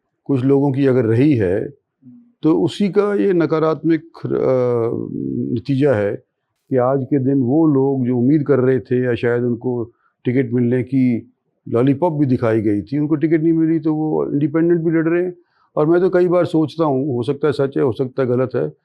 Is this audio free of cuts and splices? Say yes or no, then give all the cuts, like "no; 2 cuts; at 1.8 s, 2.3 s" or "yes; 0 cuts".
yes; 0 cuts